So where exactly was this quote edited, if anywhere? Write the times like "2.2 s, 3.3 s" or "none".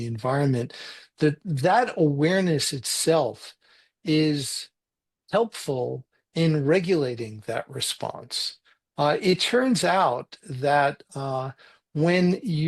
none